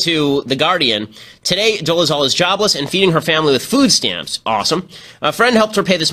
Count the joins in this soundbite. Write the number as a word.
one